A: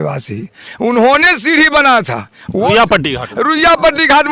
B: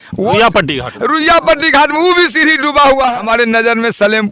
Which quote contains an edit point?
B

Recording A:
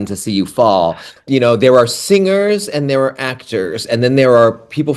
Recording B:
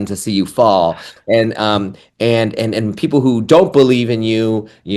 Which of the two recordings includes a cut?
A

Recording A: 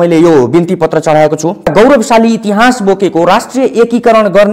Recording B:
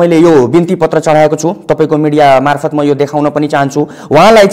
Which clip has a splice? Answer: A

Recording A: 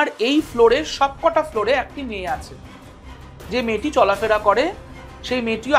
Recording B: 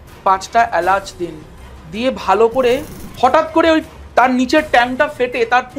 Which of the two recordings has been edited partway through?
B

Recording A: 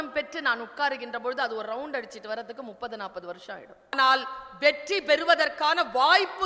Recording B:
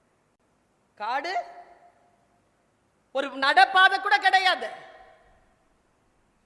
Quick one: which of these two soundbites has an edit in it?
A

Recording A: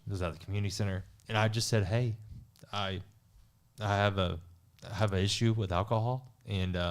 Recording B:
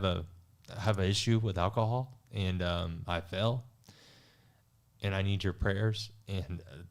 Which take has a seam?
A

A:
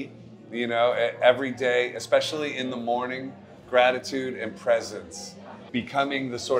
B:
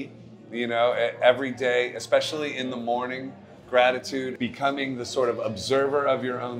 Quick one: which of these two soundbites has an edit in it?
B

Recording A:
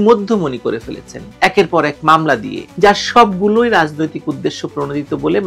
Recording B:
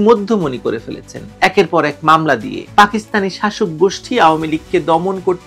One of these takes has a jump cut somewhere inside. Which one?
B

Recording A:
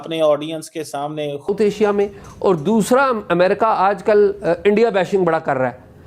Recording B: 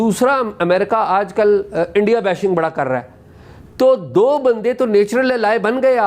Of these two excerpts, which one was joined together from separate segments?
A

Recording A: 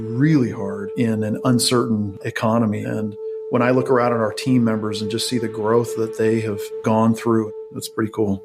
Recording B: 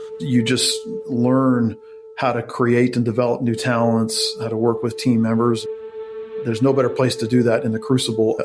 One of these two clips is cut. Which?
A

